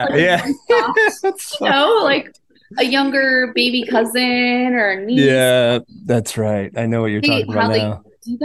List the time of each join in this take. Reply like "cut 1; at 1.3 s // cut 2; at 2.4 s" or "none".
none

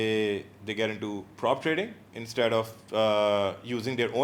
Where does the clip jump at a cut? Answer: none

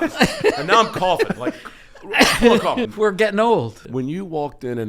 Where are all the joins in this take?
cut 1; at 2.9 s // cut 2; at 3.9 s

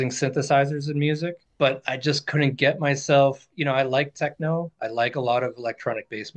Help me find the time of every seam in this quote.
cut 1; at 1.4 s

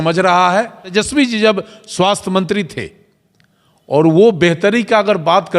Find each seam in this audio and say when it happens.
cut 1; at 0.9 s

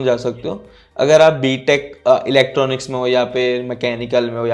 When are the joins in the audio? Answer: none

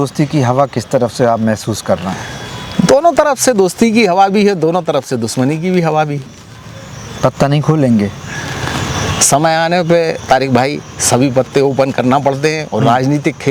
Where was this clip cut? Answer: none

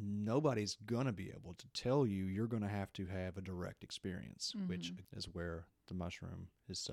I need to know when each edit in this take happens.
cut 1; at 5.0 s

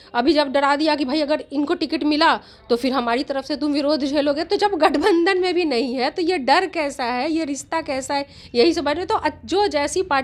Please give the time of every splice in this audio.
none

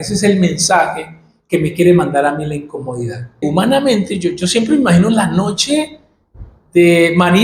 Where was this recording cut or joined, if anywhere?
cut 1; at 3.4 s

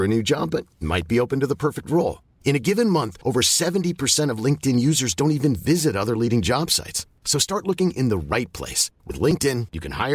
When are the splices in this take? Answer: none

